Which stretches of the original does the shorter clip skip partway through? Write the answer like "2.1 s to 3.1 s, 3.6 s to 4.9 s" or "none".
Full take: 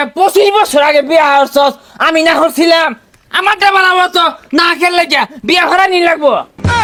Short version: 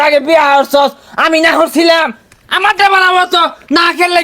none

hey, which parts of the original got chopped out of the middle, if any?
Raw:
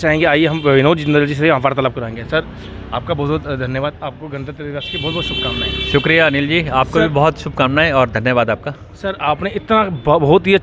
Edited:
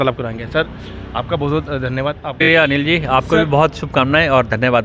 4.2 s to 6.0 s

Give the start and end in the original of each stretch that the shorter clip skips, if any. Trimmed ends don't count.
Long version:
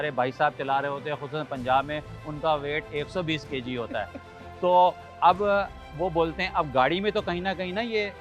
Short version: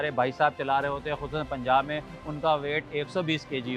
none

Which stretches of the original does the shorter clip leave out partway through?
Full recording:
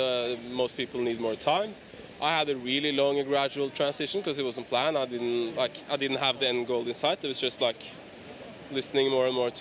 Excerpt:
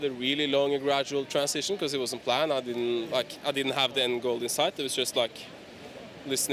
none

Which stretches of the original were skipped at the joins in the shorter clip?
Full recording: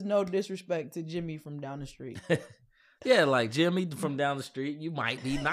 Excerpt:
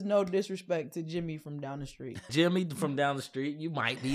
2.3 s to 3.5 s

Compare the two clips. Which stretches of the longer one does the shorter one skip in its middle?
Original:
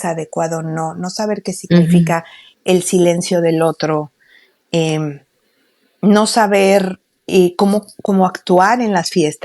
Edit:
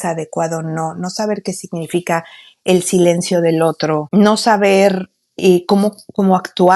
4.0 s to 6.0 s

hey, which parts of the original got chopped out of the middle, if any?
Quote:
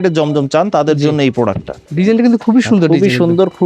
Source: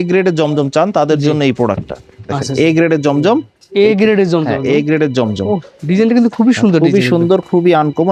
2.0 s to 5.7 s

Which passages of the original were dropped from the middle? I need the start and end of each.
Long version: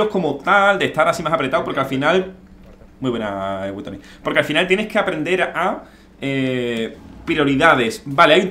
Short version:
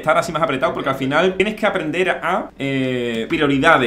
2.3 s to 4.7 s, 6.2 s to 6.9 s

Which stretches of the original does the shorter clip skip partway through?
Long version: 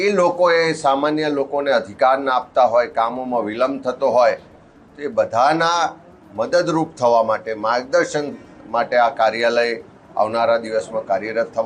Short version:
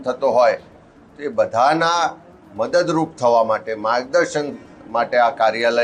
none

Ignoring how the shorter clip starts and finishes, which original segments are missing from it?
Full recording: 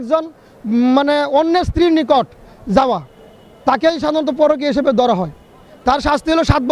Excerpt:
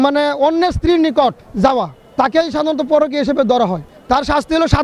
2.5 s to 3.1 s, 5.4 s to 5.6 s

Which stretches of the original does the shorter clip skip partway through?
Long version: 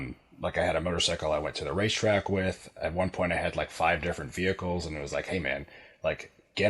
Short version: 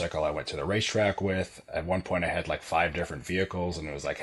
none

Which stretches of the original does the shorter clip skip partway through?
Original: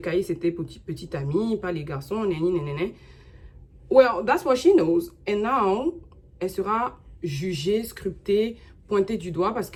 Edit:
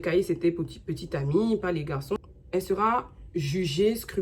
2.2 s to 6.1 s

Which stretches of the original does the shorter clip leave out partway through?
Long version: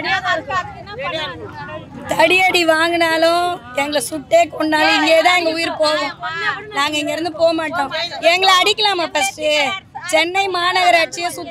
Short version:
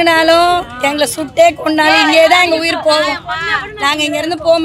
none

